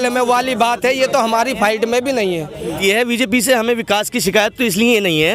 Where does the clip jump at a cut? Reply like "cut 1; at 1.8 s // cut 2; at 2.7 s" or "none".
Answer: cut 1; at 2.7 s